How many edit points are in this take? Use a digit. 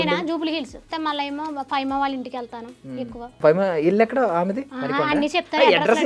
3